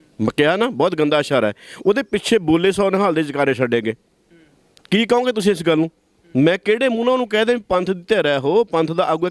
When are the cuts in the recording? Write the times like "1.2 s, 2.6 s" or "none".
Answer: none

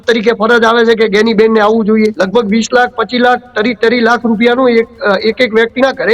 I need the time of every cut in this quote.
2.2 s

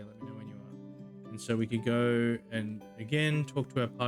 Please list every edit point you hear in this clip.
none

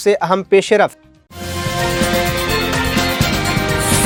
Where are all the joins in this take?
none

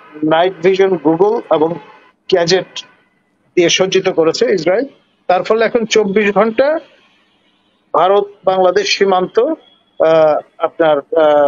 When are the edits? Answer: none

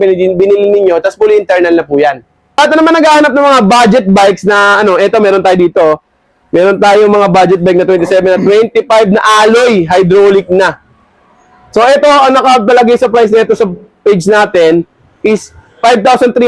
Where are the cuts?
2.6 s

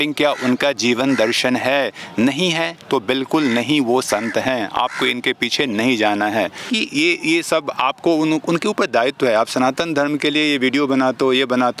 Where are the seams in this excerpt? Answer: 6.7 s

